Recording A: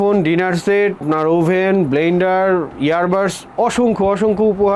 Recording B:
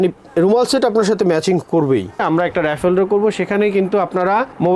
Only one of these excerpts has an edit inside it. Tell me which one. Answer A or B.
B